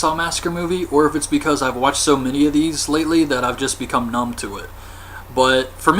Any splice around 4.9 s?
yes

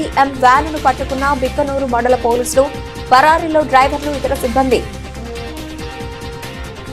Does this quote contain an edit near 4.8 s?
yes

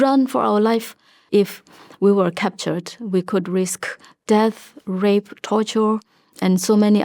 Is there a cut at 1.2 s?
yes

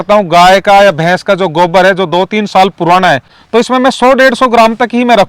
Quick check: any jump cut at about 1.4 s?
no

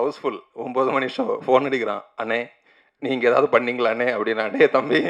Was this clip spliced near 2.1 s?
no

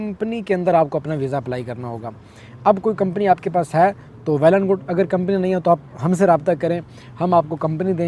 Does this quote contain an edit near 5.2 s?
no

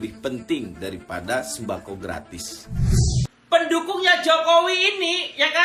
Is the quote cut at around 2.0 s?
no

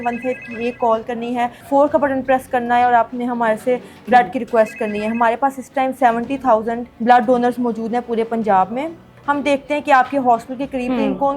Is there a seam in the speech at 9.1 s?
yes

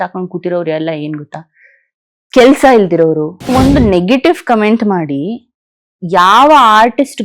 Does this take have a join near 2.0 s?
no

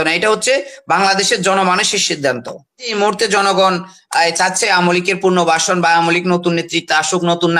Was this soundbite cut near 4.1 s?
no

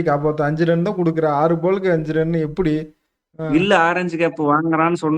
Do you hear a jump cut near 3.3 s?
yes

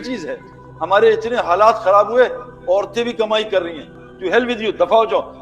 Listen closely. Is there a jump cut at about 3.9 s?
yes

